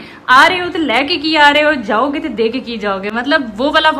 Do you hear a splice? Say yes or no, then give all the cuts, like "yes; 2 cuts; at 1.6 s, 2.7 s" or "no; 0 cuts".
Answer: no; 0 cuts